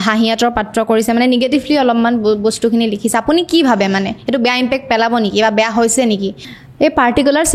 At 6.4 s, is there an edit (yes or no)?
yes